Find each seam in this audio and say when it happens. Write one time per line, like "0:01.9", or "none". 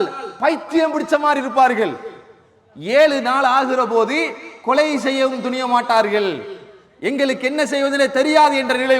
none